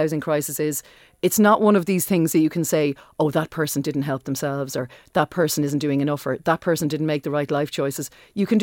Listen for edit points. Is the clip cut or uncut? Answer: uncut